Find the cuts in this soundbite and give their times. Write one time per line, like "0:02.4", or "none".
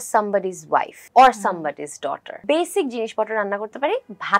0:01.0
0:02.4